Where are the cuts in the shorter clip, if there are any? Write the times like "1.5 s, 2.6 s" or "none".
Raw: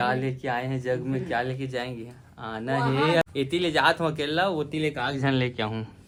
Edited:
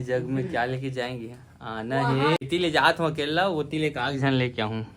2.4 s